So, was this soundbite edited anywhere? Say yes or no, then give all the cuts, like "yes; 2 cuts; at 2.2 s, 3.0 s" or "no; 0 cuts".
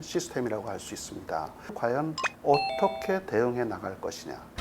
yes; 1 cut; at 1.7 s